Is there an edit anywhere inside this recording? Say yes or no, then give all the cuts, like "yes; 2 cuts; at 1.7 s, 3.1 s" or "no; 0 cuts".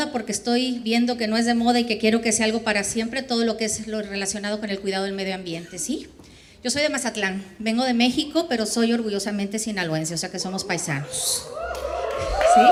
no; 0 cuts